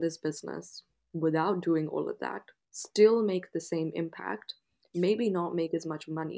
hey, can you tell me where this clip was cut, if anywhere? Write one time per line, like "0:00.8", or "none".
none